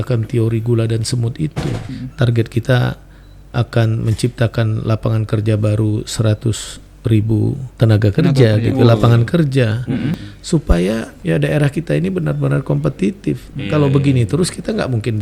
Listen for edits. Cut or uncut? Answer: cut